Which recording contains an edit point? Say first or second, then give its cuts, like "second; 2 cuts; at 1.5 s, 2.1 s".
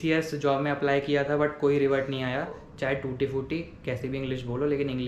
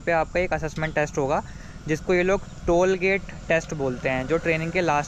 first; 1 cut; at 2.7 s